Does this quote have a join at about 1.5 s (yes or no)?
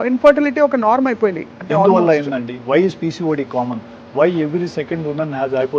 yes